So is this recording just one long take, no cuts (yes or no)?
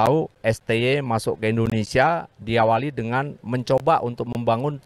yes